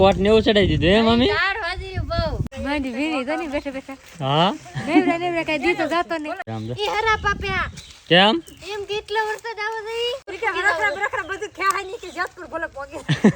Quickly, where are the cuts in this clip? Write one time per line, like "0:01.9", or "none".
0:02.4
0:06.4
0:10.3